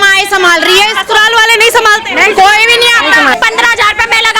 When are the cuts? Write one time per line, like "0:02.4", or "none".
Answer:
0:03.3